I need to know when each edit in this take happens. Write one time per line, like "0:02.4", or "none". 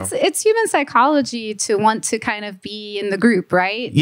none